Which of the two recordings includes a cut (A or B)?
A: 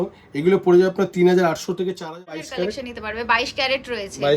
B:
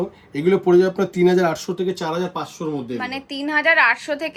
A